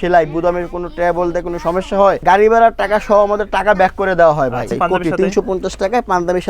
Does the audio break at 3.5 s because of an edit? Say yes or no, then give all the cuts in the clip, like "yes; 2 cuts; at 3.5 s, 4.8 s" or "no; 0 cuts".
no; 2 cuts; at 2.2 s, 4.7 s